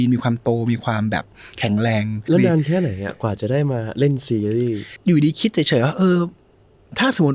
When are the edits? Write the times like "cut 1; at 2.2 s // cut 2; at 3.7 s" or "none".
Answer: cut 1; at 2.3 s // cut 2; at 4.9 s